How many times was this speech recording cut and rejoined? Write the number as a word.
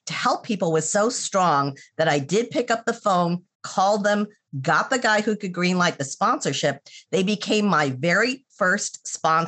zero